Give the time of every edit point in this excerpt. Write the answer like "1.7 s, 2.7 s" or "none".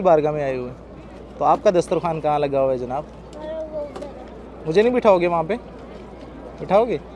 none

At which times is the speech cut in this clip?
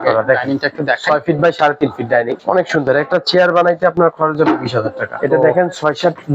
2.4 s, 5.2 s

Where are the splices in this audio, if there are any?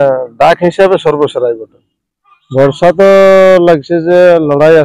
2.4 s

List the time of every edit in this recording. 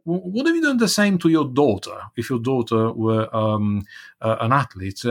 none

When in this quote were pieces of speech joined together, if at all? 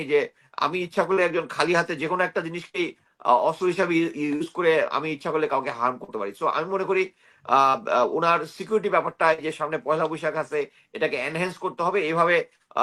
none

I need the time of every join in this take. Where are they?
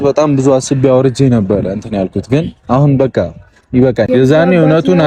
4.1 s

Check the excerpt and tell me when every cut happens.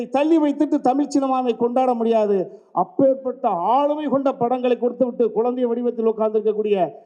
none

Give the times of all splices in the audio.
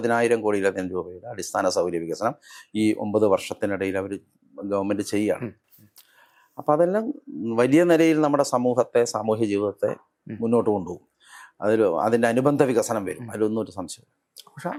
none

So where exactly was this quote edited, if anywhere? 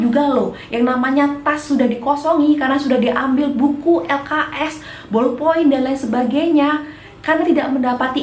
none

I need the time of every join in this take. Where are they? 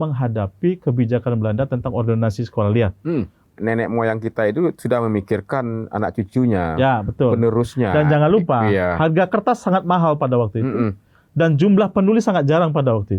3.4 s

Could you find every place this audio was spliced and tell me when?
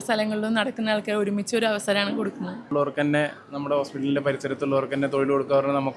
2.7 s

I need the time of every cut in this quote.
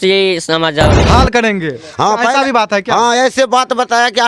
1.0 s

